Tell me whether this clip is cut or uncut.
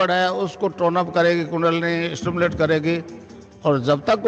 uncut